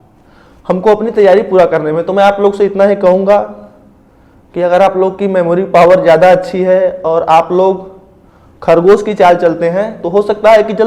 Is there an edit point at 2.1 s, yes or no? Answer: no